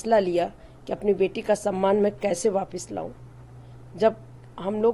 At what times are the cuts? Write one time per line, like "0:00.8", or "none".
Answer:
none

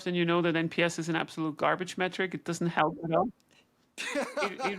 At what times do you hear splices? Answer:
none

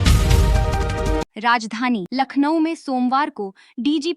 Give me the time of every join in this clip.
0:01.3

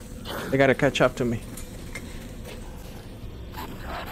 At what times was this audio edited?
none

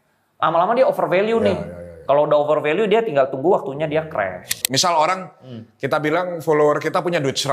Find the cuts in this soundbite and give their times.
0:04.6

